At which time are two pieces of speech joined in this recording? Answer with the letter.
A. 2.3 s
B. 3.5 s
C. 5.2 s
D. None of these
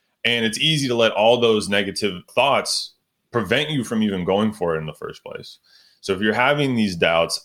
A